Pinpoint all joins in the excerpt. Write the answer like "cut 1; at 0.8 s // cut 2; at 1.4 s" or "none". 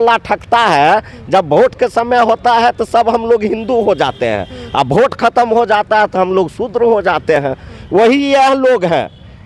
none